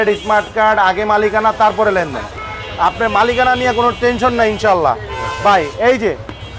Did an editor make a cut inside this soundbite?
no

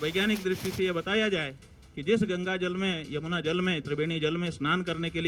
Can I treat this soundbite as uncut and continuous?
yes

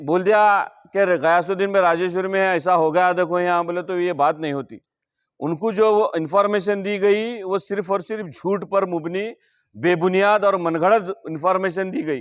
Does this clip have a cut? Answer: no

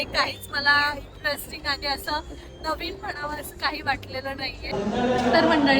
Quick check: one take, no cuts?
no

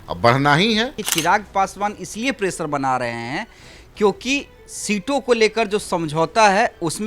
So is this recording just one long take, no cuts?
no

